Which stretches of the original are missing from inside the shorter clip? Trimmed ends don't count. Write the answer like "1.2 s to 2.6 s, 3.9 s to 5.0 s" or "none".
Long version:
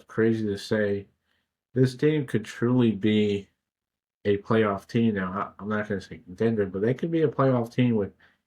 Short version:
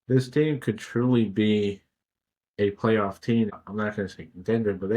5.2 s to 5.4 s